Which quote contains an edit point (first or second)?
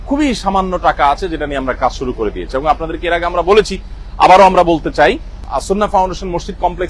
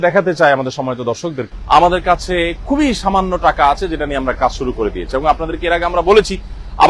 second